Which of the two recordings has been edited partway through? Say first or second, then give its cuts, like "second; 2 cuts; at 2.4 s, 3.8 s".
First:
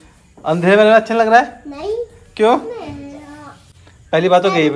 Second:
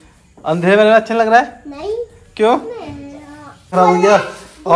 second; 1 cut; at 3.7 s